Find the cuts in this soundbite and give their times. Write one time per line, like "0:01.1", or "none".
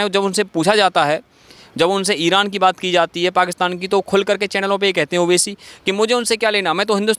none